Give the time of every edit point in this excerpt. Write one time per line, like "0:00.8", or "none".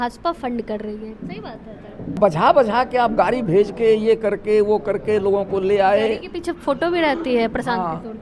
0:02.2